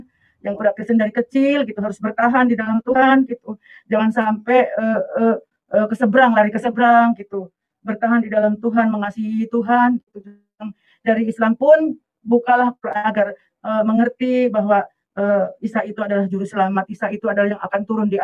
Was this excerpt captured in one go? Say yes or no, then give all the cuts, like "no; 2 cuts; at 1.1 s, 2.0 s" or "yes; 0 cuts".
yes; 0 cuts